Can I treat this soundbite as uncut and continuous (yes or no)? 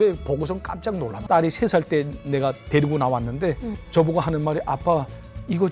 no